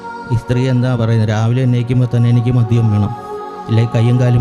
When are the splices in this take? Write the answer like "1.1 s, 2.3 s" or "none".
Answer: none